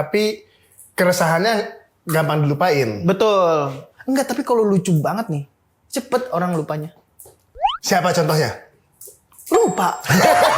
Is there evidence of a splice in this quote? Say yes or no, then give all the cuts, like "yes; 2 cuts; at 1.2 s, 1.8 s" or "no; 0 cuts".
no; 0 cuts